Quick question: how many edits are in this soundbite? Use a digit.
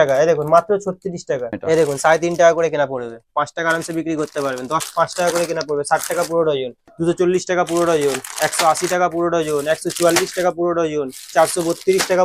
3